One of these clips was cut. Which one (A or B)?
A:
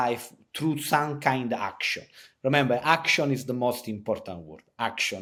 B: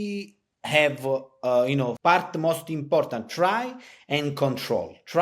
B